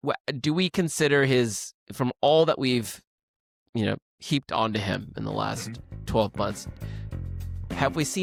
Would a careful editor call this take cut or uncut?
uncut